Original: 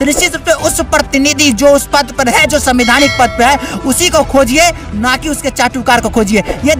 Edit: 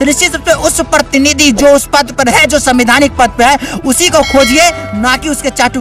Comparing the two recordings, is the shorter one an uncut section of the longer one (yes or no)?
yes